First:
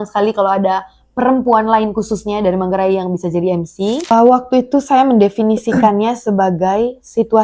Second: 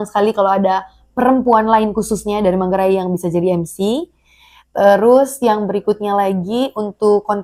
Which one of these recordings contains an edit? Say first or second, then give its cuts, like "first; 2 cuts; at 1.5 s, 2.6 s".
first; 1 cut; at 4.1 s